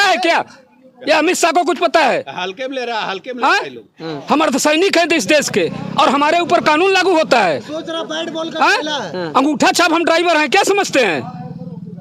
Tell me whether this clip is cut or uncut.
uncut